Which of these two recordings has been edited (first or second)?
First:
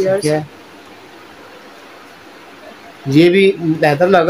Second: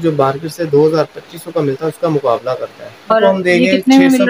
second